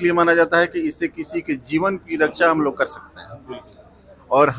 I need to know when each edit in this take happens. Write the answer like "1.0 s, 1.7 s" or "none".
none